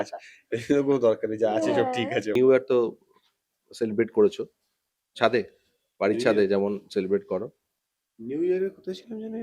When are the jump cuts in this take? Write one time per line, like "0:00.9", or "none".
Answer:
0:02.3

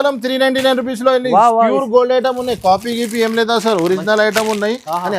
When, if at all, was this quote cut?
none

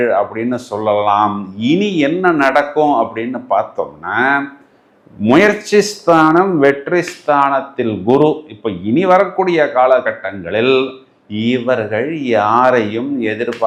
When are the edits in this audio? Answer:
none

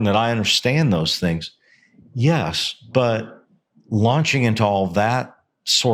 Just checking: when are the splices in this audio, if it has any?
none

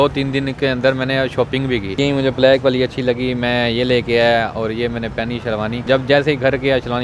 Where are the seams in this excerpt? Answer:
0:02.0
0:05.8

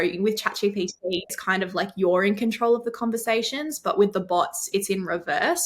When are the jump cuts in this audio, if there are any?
0:01.4

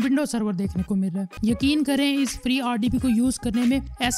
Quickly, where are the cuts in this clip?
0:01.3

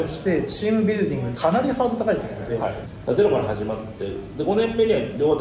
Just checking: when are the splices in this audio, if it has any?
0:01.3
0:02.8

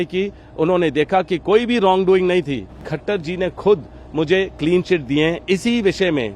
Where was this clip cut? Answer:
0:02.9

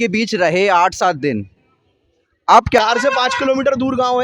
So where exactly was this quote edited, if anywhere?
0:02.8

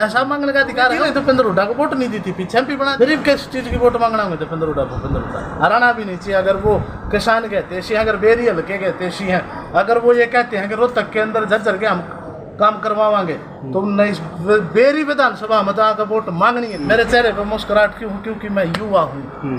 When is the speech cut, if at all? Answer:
0:01.0
0:02.9
0:16.7

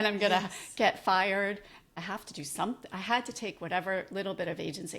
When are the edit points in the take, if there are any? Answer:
0:01.9

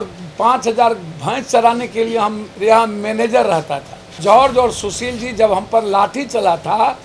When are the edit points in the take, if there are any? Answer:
0:02.5
0:04.2

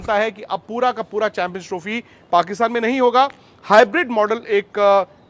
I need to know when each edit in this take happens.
none

